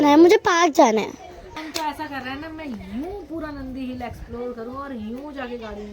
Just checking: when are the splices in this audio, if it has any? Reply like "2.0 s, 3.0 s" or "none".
1.6 s